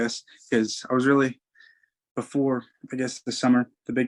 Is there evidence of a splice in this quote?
no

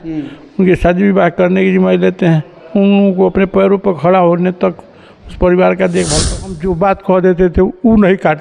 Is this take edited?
yes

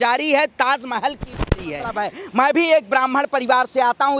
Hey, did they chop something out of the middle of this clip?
yes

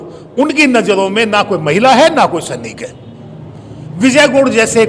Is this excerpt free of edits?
yes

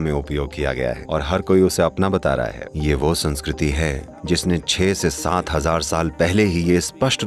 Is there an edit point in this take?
yes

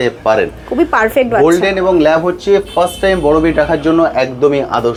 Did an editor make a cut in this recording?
no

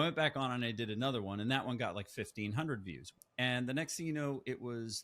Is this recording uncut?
no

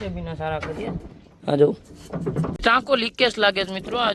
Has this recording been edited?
yes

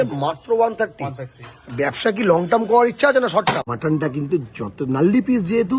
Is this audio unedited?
no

